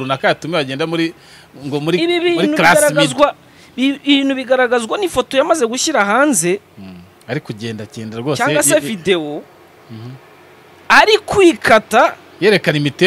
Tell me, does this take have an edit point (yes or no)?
no